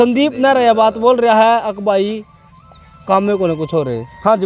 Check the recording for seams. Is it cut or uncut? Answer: uncut